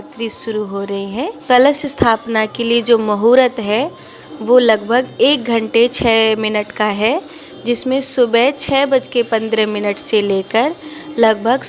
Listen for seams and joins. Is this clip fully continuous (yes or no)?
no